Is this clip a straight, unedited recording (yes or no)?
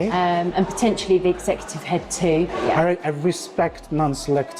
no